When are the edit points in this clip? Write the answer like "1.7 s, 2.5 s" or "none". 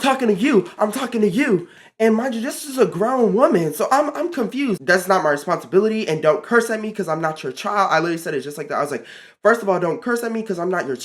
1.8 s, 4.8 s